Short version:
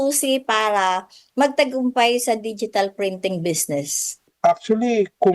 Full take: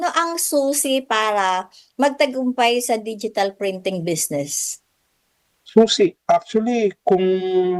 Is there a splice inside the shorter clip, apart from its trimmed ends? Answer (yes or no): yes